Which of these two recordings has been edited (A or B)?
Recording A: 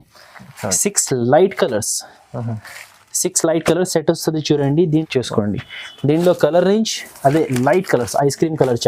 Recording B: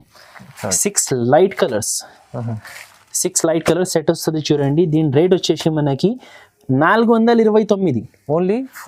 A